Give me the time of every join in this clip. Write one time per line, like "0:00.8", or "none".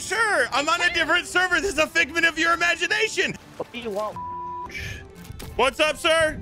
0:03.4